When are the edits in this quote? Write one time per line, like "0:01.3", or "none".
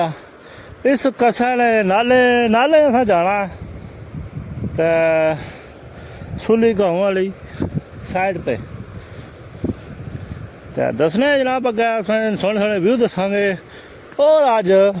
none